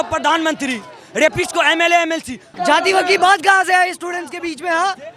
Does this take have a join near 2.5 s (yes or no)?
yes